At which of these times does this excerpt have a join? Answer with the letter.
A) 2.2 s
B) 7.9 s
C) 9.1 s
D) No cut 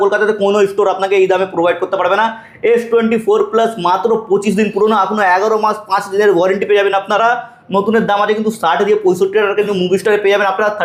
D